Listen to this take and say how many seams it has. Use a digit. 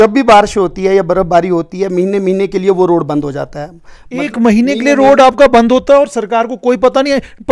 0